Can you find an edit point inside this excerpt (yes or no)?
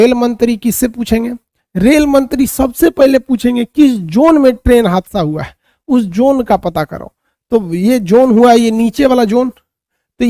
no